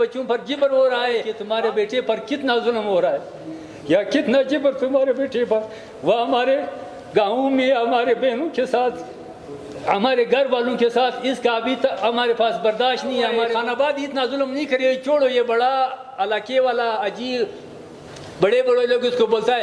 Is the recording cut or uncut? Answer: cut